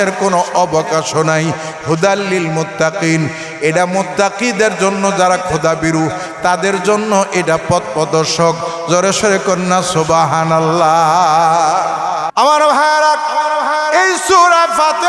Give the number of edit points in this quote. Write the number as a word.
one